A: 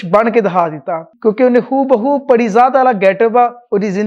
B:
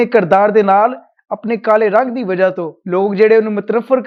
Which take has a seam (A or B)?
A